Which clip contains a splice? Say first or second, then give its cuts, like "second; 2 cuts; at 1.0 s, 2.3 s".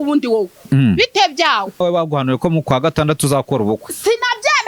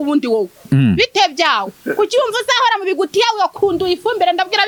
first; 1 cut; at 1.8 s